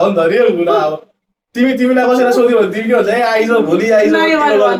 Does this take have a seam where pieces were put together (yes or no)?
no